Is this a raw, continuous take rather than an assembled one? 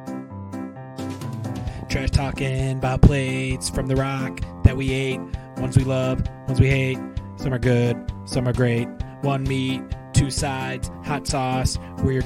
no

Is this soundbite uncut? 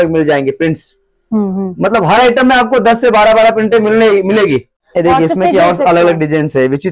no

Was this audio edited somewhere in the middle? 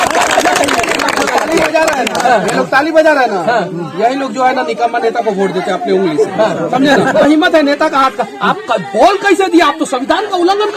yes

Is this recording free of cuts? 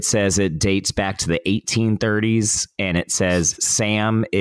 yes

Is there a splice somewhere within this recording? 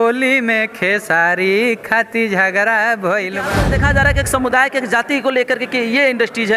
yes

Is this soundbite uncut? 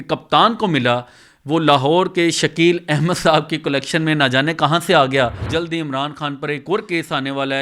no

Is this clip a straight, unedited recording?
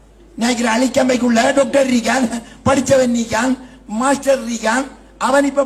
yes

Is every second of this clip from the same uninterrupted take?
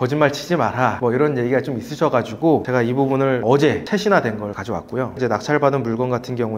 yes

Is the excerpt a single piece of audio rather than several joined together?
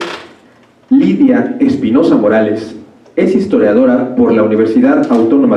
yes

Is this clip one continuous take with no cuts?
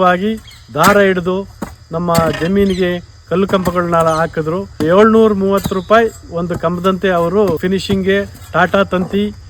no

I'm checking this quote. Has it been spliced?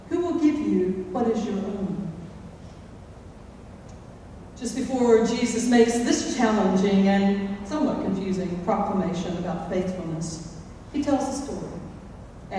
yes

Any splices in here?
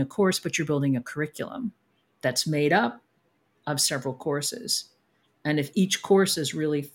no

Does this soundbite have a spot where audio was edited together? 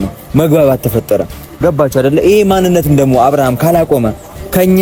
no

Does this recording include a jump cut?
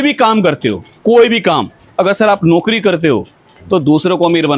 yes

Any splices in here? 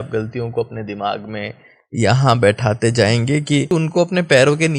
yes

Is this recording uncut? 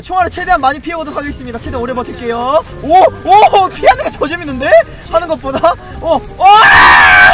yes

